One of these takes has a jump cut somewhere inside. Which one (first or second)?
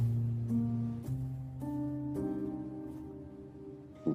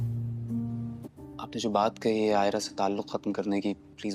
second